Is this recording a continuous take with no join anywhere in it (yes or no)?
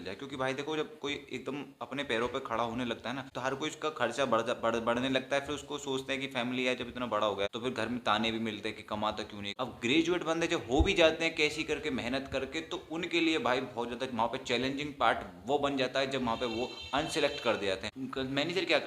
no